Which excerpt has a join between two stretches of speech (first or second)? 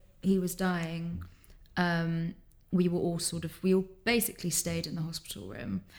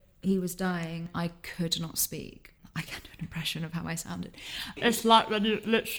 second